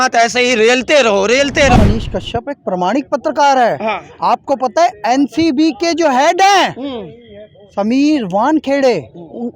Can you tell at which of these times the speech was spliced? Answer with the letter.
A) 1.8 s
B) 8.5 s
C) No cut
A